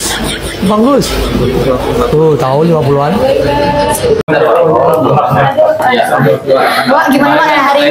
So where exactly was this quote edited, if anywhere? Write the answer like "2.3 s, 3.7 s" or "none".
4.2 s